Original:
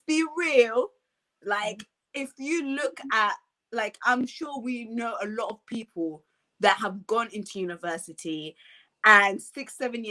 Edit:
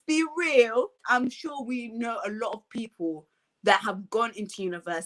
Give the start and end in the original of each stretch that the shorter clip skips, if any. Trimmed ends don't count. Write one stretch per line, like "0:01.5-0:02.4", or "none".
0:01.0-0:04.0